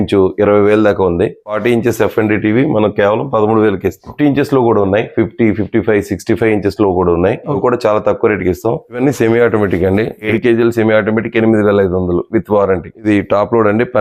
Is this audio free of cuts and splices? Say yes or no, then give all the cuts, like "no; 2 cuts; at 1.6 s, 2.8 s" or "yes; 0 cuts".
no; 6 cuts; at 1.4 s, 4.0 s, 7.6 s, 9.0 s, 10.2 s, 12.9 s